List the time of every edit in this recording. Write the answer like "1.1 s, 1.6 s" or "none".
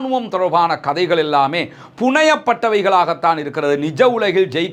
none